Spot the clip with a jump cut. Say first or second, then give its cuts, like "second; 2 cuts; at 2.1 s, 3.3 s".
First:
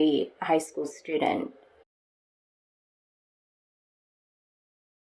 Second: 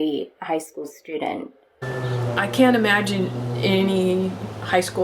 second; 1 cut; at 1.8 s